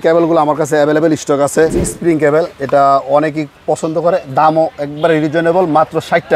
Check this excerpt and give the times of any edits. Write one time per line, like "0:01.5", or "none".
0:01.8